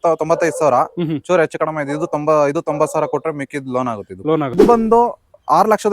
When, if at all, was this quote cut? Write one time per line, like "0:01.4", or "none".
0:04.6